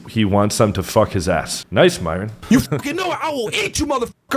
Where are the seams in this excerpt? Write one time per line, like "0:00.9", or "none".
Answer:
0:01.6
0:02.3